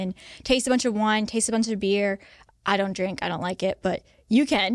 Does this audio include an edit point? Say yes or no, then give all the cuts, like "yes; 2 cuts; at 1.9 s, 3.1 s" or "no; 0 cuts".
no; 0 cuts